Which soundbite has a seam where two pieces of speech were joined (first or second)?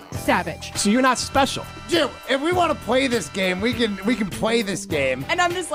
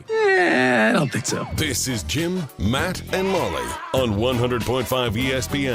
second